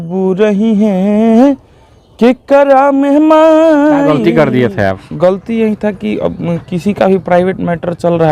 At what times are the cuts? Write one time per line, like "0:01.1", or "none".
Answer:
0:04.1

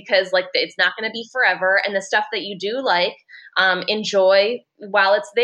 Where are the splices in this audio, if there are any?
none

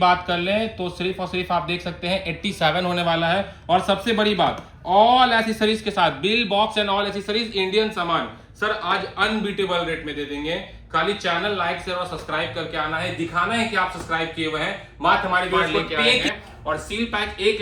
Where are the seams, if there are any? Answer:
0:16.3

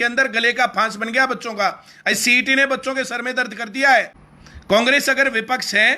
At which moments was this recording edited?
0:04.2

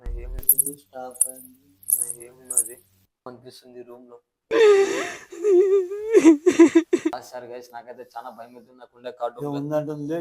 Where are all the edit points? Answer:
0:03.3
0:07.1

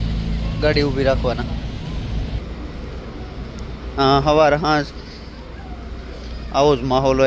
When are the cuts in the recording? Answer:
0:02.4

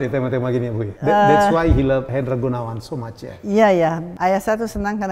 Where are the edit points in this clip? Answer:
0:00.9
0:02.1
0:04.1

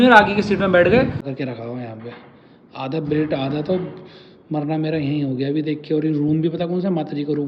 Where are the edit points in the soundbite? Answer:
0:01.3

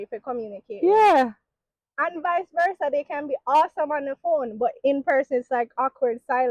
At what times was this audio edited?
none

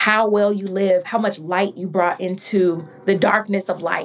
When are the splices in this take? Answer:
0:01.1

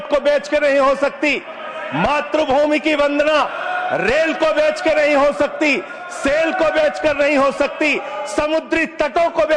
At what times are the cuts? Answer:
none

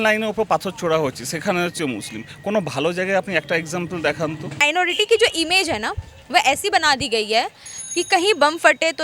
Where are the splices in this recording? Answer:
0:04.6

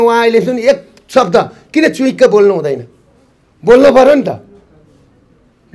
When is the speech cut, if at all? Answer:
none

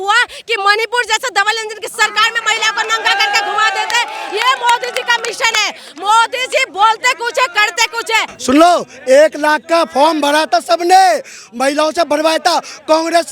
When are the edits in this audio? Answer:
0:08.3

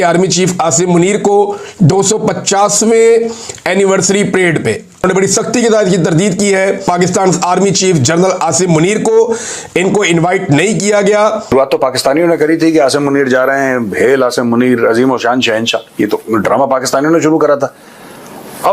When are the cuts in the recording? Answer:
0:05.0
0:06.9
0:11.5

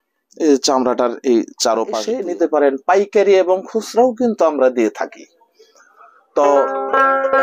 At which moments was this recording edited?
0:02.1

